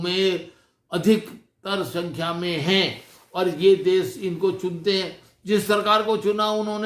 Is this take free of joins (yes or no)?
yes